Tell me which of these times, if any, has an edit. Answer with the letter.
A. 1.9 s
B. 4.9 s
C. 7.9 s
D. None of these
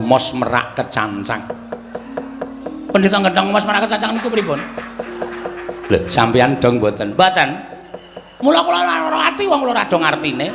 D